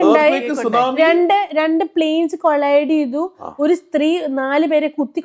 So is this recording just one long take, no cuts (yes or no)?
yes